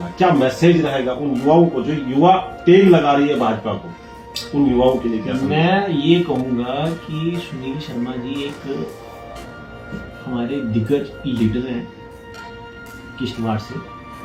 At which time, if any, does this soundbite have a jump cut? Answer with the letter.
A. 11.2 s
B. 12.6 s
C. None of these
C